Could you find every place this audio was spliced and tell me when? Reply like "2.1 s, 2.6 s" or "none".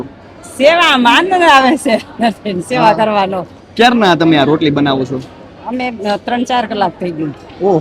none

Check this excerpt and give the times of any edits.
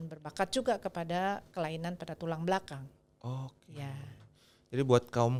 none

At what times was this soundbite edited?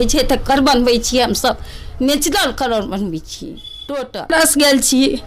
4.3 s

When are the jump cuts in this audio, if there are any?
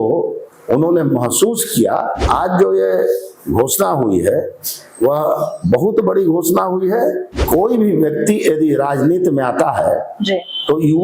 2.2 s, 7.3 s

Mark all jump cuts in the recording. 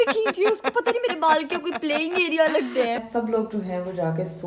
3.0 s

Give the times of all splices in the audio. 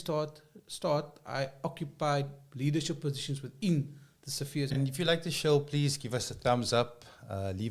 4.7 s

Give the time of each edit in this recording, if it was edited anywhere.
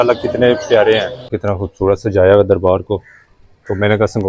1.4 s

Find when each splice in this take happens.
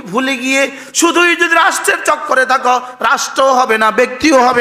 none

